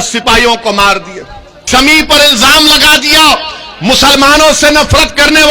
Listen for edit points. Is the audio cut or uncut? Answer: cut